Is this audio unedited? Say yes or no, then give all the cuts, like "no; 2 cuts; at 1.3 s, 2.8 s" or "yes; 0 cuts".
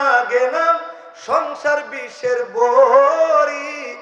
yes; 0 cuts